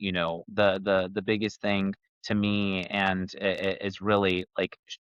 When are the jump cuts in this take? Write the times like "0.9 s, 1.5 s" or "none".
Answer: none